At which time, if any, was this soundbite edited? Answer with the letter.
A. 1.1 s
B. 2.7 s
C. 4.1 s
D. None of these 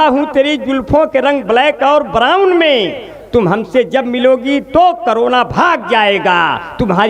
D